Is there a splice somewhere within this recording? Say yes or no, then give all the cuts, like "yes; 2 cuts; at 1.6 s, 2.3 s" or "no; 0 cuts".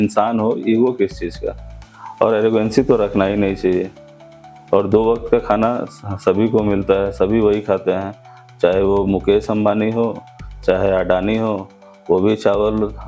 no; 0 cuts